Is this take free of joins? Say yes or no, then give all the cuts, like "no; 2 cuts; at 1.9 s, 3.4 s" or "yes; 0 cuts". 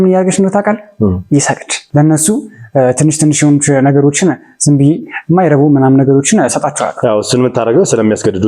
no; 1 cut; at 1.7 s